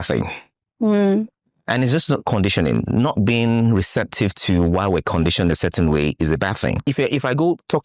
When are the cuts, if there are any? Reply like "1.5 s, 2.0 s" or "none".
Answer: 6.8 s